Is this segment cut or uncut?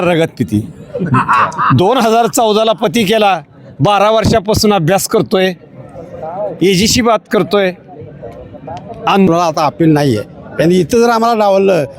cut